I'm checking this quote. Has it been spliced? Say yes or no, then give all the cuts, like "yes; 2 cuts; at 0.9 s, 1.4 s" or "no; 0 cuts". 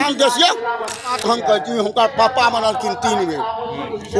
yes; 1 cut; at 1.1 s